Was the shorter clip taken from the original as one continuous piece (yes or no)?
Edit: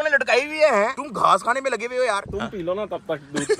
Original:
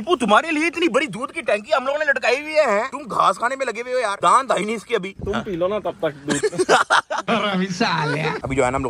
no